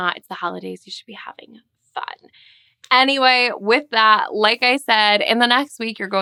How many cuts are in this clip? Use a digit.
0